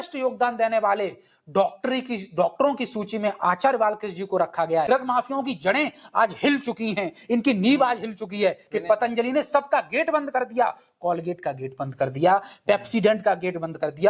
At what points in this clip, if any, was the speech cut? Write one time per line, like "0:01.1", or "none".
0:04.9